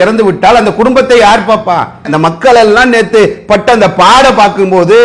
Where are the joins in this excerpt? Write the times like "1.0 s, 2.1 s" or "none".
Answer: 2.1 s